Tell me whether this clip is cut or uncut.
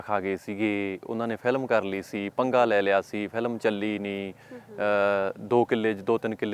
uncut